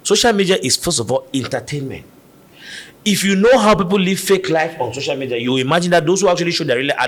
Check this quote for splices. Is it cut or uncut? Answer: uncut